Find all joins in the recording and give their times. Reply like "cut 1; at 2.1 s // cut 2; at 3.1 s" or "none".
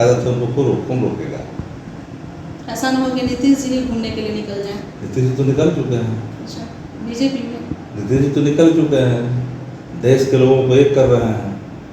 none